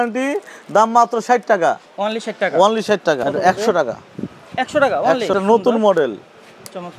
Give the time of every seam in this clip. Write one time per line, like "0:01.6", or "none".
0:03.2
0:05.3